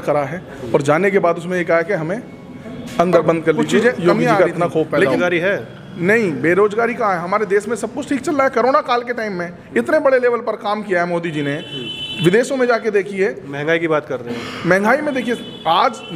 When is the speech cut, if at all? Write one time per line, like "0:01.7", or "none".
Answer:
0:05.0